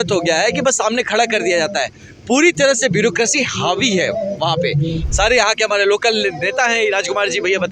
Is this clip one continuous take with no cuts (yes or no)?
no